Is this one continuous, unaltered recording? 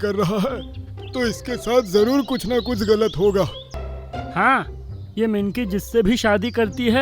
no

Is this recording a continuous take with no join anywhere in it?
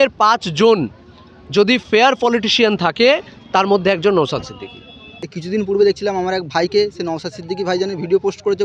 no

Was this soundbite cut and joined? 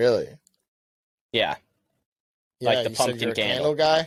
no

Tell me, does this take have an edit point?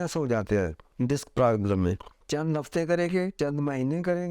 yes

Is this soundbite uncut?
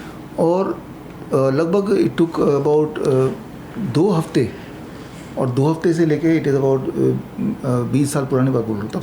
yes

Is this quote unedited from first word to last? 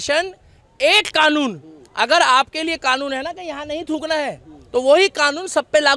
yes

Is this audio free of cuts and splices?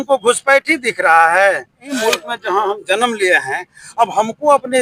no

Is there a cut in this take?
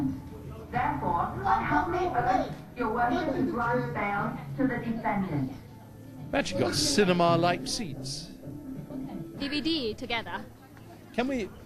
no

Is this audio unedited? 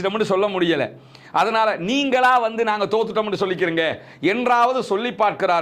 yes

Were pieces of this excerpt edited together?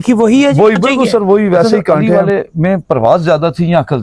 yes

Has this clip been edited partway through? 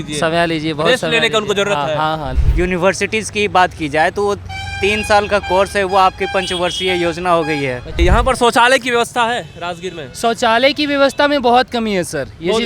yes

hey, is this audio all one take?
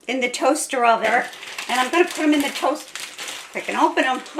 no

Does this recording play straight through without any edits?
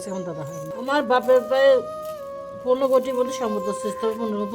no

